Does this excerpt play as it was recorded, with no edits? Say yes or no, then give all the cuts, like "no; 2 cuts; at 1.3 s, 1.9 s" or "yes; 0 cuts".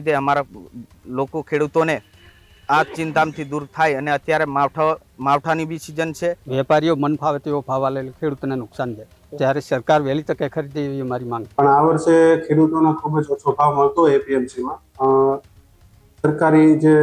no; 2 cuts; at 6.4 s, 11.4 s